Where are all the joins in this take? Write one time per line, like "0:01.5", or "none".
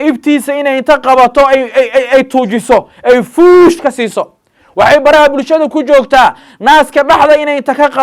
none